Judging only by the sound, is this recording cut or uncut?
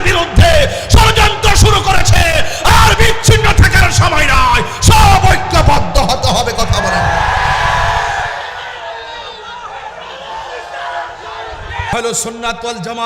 cut